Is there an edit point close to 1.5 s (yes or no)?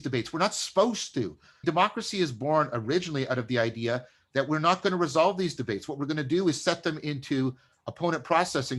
yes